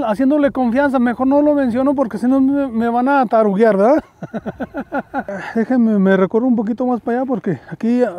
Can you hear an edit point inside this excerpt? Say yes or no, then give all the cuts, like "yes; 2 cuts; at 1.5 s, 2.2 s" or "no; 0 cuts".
yes; 1 cut; at 5.4 s